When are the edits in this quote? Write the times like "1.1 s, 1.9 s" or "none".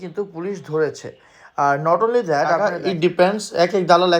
2.7 s